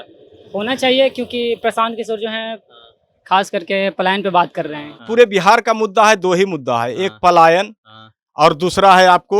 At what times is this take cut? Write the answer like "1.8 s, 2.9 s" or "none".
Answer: 5.0 s